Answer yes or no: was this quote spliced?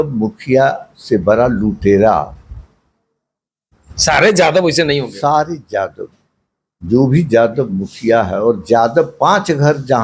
no